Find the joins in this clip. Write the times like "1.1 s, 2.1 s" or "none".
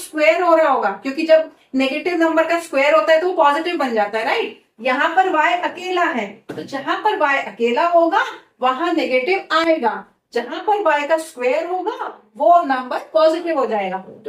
none